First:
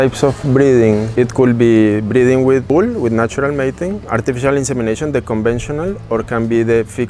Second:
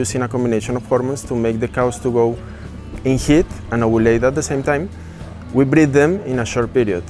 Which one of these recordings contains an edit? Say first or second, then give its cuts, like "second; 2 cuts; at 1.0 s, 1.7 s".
first; 3 cuts; at 1.1 s, 2.7 s, 4.0 s